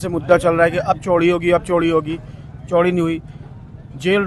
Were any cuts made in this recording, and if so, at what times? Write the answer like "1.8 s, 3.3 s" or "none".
none